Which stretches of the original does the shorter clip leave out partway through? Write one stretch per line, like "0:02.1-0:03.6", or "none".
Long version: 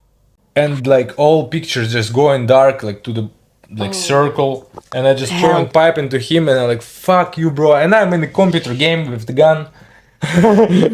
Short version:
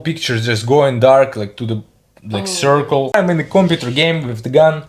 0:04.6-0:08.0